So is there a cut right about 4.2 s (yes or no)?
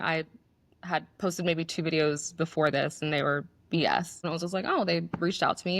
yes